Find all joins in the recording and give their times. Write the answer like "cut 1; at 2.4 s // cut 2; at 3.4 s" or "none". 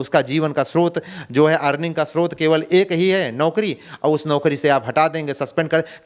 none